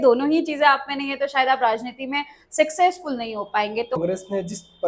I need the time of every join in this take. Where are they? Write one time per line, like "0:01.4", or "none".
0:04.0